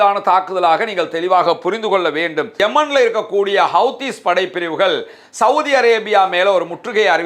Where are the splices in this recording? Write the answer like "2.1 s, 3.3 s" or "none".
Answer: 2.5 s